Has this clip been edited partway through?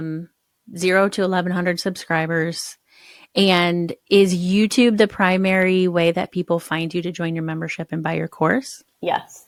no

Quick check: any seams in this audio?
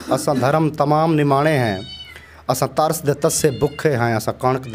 no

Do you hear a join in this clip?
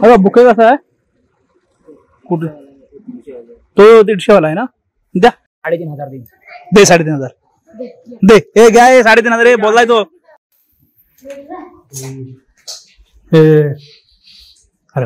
yes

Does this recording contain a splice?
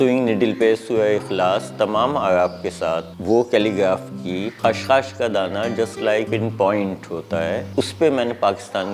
yes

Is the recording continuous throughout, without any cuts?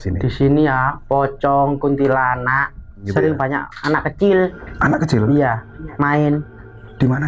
no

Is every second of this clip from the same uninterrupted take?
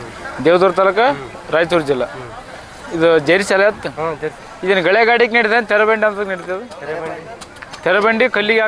yes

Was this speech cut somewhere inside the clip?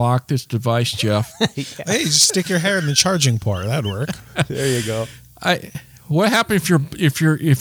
no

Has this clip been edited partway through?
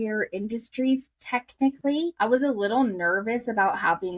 yes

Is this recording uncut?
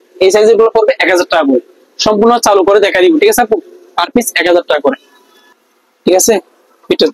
yes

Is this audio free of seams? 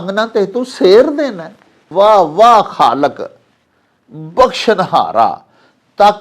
no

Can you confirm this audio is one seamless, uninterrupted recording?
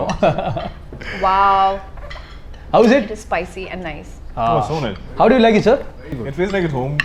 yes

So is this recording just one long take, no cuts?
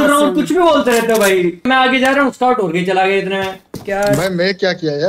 no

